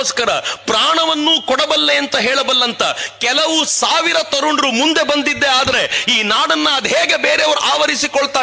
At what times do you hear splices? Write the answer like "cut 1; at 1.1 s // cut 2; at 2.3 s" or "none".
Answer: none